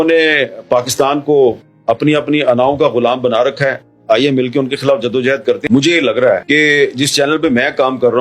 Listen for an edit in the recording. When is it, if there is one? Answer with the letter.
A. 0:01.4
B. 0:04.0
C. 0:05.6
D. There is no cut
C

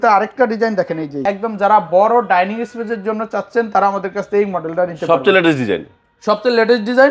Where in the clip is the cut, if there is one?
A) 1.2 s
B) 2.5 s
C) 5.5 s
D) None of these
A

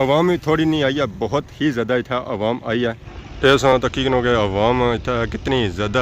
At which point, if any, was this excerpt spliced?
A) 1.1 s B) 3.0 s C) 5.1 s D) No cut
B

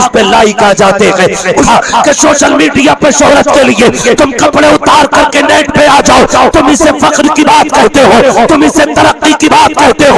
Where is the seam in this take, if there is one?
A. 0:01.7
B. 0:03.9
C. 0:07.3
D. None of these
A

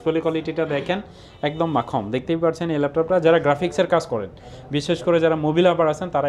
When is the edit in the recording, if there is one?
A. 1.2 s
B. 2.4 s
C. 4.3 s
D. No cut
D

